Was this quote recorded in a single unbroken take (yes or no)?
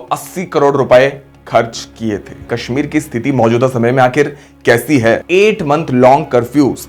no